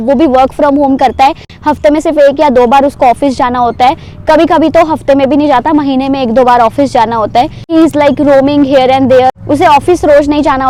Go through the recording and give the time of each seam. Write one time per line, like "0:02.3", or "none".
none